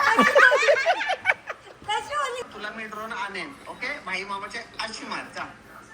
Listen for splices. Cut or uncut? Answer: cut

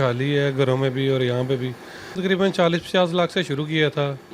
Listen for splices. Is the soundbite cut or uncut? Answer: cut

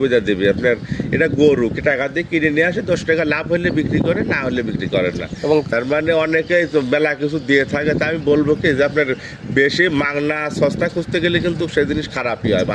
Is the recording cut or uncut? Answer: uncut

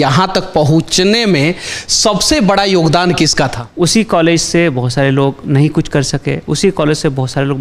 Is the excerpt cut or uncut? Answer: cut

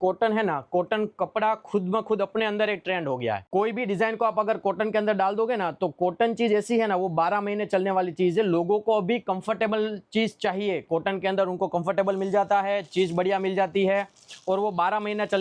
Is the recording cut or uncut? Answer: uncut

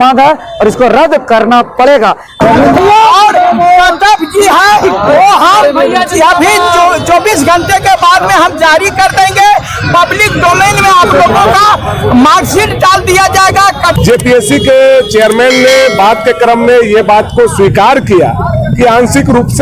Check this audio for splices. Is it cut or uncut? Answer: cut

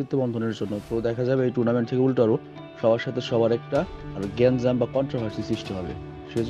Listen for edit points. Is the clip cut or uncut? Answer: uncut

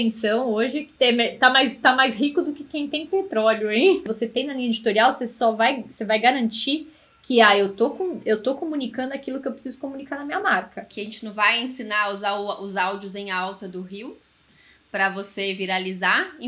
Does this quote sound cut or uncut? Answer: cut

